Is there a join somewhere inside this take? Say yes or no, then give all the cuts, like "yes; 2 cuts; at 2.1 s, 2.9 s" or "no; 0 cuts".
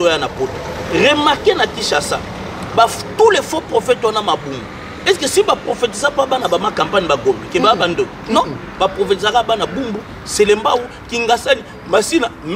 no; 0 cuts